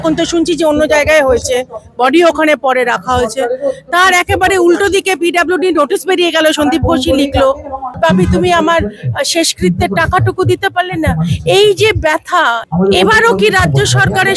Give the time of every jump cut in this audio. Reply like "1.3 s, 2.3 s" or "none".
7.9 s, 12.6 s